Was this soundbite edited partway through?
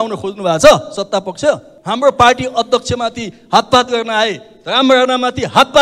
yes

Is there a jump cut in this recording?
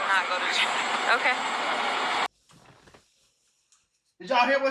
no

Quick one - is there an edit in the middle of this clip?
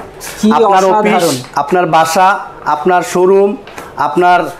no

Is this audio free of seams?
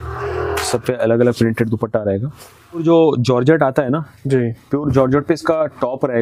no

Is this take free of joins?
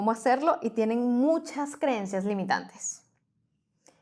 yes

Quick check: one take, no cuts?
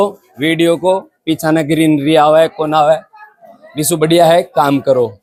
yes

